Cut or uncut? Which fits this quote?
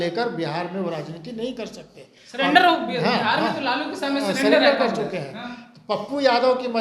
uncut